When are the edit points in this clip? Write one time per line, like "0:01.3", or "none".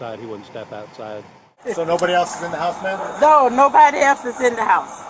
0:01.6